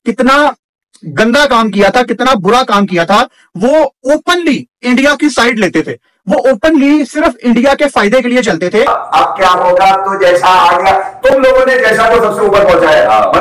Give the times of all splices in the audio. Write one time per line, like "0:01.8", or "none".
0:08.9